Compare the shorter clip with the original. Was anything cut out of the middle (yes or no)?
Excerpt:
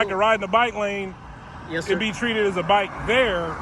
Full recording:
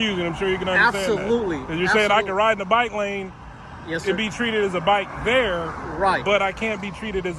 no